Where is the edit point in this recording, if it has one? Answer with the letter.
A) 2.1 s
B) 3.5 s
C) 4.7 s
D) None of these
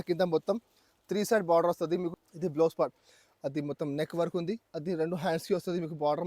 A